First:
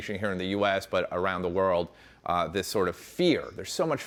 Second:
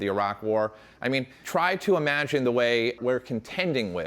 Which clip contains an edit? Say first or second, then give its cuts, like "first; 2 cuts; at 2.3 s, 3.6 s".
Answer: second; 2 cuts; at 1.4 s, 3.0 s